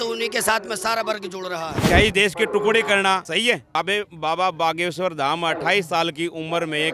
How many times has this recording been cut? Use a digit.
2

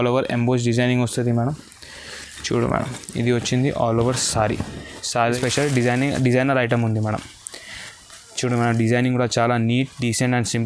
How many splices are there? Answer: 1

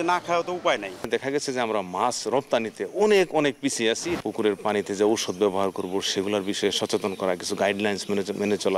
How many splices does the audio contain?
2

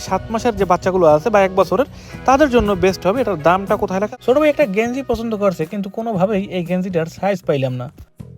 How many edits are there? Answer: 1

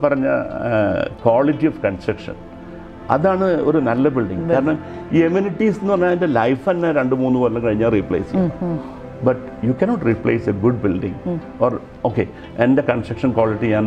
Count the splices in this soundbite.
0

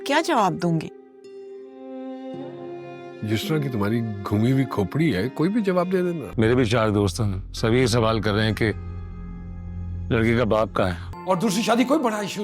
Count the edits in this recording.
2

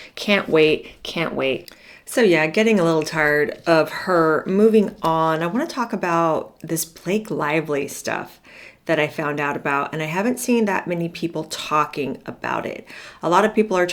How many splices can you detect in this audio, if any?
0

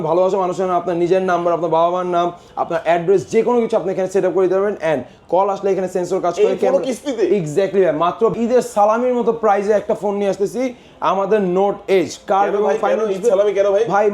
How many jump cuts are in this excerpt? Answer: 1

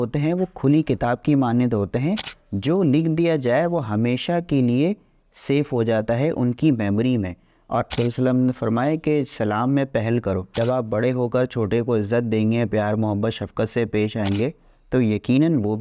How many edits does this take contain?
2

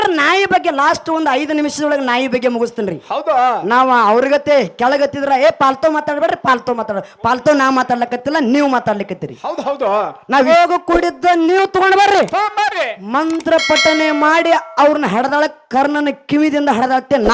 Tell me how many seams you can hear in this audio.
1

